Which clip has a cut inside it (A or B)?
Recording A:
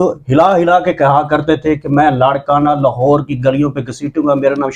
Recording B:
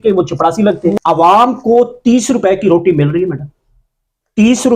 B